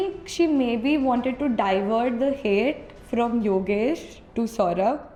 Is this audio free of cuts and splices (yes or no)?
yes